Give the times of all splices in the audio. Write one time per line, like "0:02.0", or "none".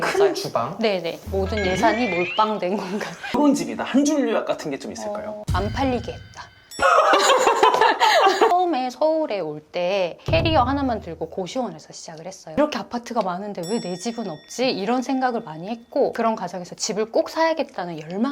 0:03.3
0:08.5
0:12.6